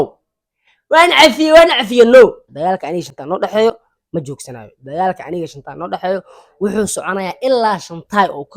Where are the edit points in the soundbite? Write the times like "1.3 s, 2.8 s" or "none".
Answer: 2.5 s